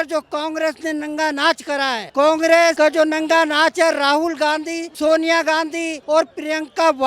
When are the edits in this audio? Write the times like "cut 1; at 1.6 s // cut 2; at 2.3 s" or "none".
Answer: cut 1; at 2.1 s // cut 2; at 2.8 s // cut 3; at 4.8 s // cut 4; at 6.0 s